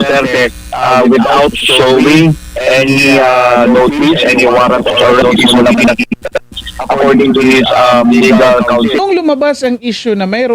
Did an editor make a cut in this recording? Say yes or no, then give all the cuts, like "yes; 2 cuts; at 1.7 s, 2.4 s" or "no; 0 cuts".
yes; 1 cut; at 9.0 s